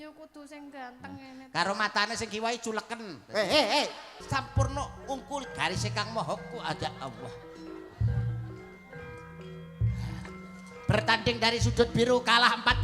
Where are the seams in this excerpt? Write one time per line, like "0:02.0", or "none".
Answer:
0:04.2